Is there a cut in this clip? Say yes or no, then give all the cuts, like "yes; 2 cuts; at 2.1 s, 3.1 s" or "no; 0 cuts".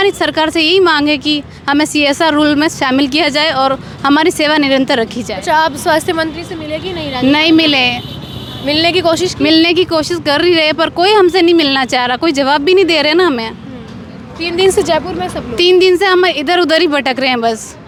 no; 0 cuts